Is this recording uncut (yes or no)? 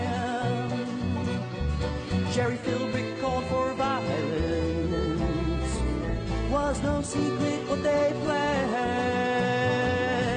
yes